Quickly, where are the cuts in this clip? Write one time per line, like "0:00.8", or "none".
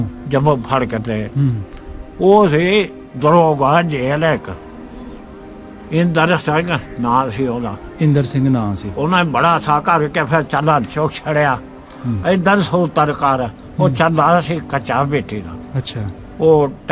0:05.2